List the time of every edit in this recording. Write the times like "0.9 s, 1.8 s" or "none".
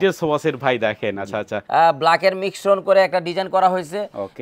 1.6 s